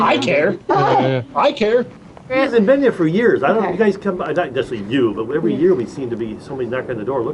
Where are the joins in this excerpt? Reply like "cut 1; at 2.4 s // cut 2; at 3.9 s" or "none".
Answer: cut 1; at 2.3 s